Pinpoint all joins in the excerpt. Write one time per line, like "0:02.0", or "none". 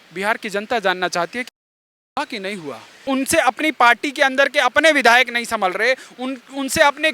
0:03.1